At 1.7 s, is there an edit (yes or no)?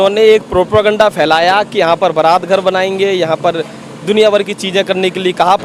no